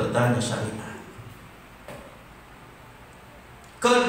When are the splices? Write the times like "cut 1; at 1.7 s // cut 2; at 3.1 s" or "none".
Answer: cut 1; at 1.9 s